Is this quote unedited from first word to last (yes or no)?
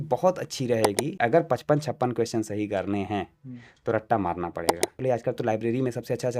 no